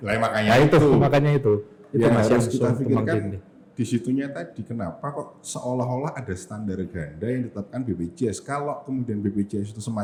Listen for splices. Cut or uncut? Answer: uncut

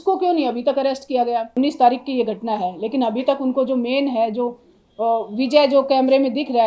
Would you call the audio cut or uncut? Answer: cut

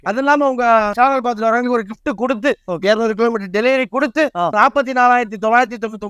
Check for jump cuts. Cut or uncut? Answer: uncut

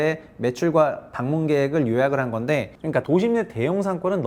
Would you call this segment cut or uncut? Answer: cut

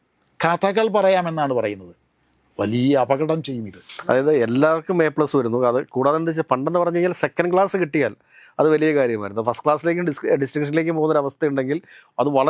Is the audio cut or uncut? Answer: cut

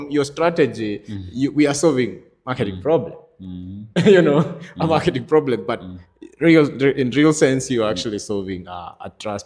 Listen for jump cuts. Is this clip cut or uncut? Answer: uncut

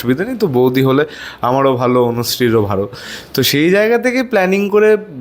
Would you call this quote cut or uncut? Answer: uncut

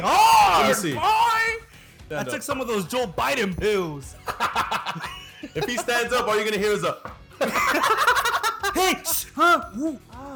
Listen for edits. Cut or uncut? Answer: uncut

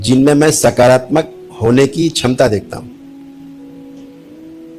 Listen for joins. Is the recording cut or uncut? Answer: uncut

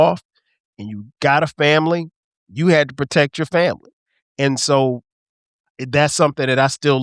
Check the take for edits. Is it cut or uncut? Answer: uncut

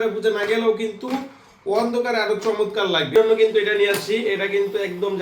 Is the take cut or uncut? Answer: cut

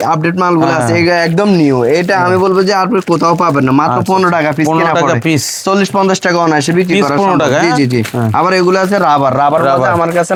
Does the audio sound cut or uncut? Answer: uncut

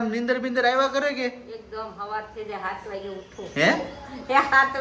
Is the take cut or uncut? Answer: uncut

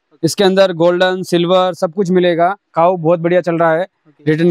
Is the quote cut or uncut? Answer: cut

